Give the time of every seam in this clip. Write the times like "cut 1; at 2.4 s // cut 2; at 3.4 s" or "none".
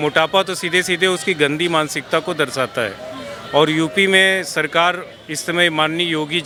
none

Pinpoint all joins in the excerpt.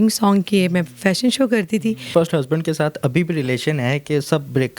cut 1; at 2.1 s

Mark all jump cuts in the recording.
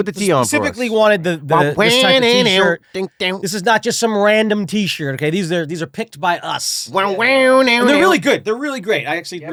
none

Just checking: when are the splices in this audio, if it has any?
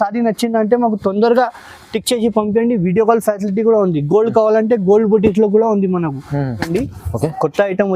cut 1; at 6.7 s

